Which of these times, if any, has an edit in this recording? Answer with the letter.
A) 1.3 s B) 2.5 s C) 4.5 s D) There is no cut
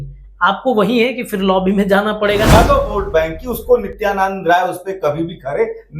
B